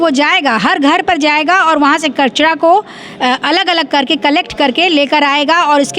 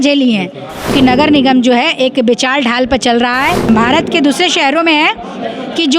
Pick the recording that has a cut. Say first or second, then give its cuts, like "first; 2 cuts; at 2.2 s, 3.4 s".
second; 2 cuts; at 0.9 s, 3.7 s